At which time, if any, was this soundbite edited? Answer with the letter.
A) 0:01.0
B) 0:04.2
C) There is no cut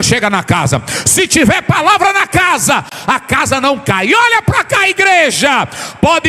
C